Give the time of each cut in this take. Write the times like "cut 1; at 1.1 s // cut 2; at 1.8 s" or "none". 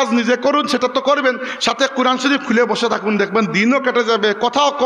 none

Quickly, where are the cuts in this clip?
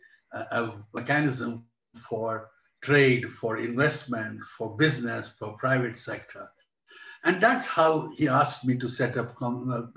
cut 1; at 1.0 s

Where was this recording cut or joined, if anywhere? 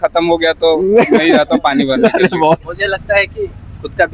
cut 1; at 2.7 s

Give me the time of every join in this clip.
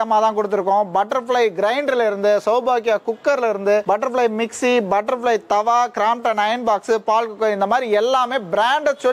none

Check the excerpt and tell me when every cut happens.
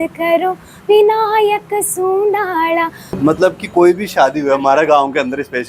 cut 1; at 3.1 s

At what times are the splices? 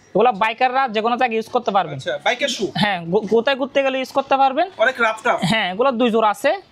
none

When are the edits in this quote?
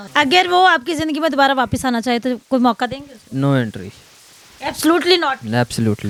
none

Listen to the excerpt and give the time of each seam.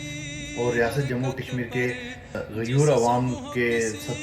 cut 1; at 2.4 s

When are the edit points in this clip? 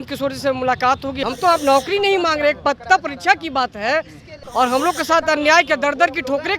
cut 1; at 1.2 s // cut 2; at 4.3 s

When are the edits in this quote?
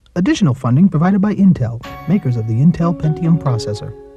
none

